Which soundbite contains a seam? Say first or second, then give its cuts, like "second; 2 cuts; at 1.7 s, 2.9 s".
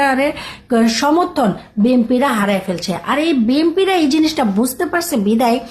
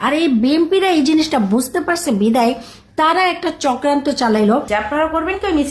second; 1 cut; at 4.7 s